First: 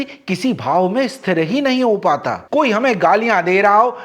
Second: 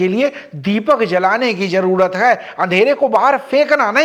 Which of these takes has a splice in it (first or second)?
first